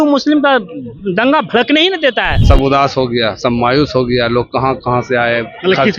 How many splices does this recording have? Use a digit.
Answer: 1